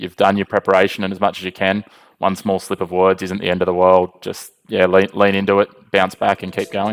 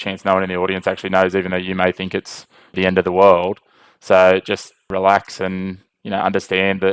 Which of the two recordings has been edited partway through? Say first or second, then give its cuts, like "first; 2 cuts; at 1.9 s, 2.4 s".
second; 2 cuts; at 2.8 s, 4.9 s